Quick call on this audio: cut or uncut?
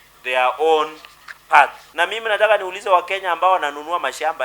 cut